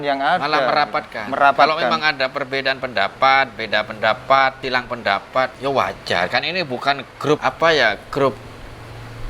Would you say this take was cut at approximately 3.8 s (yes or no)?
no